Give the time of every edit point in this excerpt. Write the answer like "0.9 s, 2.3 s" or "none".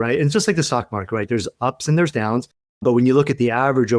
none